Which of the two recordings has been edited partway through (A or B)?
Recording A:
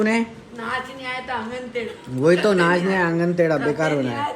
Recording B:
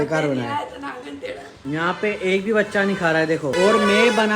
B